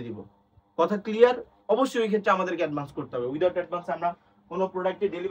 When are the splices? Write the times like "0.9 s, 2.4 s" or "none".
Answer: none

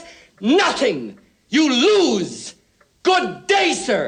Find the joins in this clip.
none

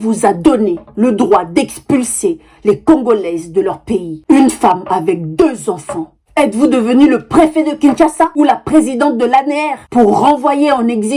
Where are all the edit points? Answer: none

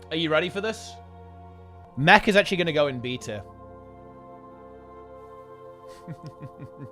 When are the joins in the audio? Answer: 1.8 s

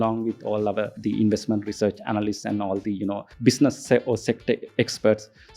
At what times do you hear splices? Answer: 0.9 s, 3.3 s

